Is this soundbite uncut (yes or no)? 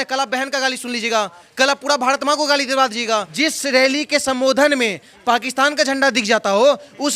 no